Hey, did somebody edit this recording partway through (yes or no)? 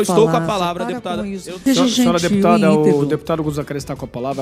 yes